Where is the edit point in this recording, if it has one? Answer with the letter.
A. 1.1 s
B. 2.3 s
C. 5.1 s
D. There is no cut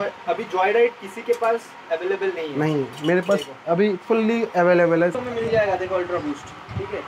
C